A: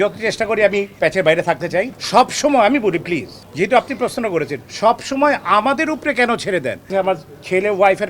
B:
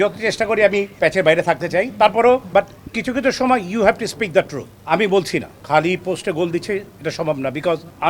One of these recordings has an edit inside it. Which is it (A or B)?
A